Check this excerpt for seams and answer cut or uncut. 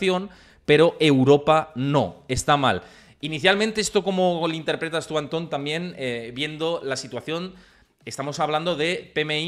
uncut